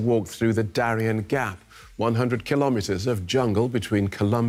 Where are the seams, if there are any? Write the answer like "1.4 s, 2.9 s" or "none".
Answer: none